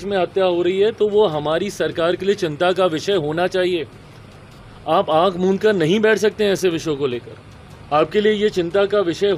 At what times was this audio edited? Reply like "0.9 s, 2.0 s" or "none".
none